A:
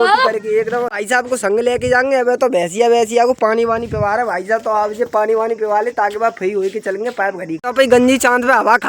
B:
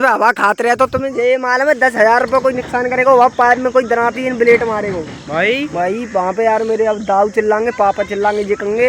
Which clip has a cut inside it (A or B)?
A